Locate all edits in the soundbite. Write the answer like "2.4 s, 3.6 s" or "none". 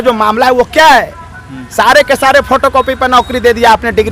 none